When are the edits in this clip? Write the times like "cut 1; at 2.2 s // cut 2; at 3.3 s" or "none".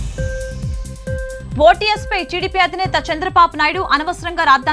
cut 1; at 1.2 s